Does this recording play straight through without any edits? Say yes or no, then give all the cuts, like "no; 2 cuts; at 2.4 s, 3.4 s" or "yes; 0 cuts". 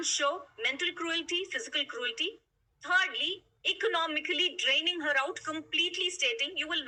yes; 0 cuts